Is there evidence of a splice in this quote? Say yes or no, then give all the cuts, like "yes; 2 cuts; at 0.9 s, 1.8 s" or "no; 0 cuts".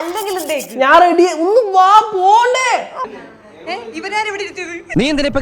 yes; 1 cut; at 3.0 s